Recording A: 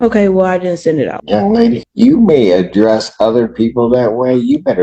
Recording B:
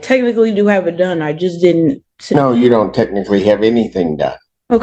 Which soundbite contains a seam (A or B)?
A